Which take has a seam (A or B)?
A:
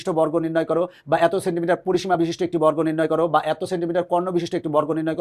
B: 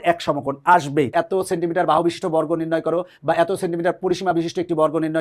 B